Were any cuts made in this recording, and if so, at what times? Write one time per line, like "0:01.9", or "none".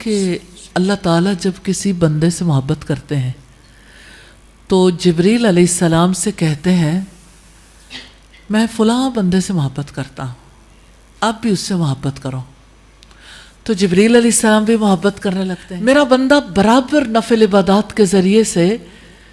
0:15.6